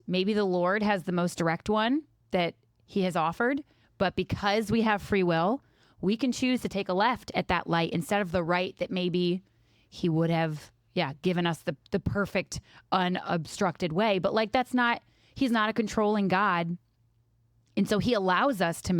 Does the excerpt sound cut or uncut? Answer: uncut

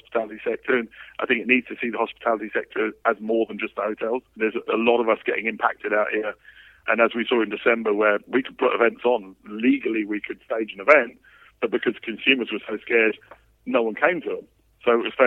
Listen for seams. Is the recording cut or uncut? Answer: cut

